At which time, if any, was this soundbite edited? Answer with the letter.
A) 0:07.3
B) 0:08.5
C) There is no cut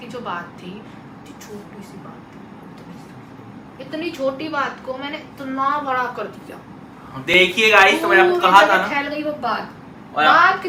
C